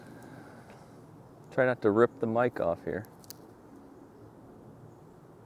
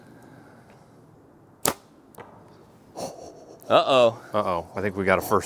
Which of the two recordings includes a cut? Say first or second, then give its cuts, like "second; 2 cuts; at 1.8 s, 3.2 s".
second; 1 cut; at 1.1 s